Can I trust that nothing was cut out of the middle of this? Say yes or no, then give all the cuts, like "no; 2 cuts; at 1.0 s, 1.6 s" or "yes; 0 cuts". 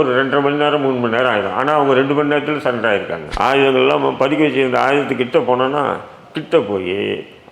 no; 1 cut; at 3.2 s